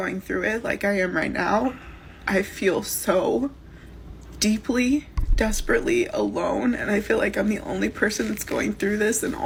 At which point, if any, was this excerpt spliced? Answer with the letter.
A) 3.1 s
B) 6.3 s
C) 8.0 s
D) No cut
D